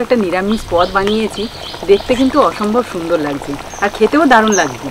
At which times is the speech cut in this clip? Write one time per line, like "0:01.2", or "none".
none